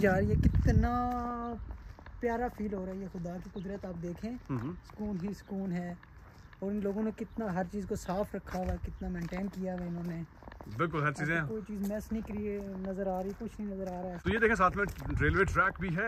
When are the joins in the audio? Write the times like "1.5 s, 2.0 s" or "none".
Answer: none